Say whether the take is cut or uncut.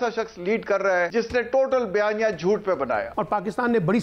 cut